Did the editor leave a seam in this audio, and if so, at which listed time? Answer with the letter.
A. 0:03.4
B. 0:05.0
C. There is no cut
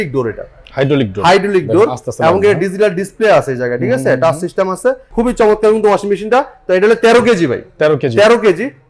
B